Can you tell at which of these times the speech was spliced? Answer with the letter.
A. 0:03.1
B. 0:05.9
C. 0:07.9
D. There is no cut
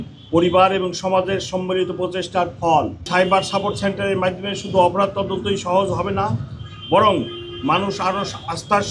A